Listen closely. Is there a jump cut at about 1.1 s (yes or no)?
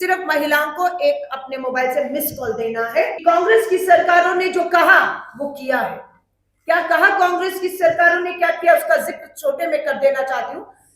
no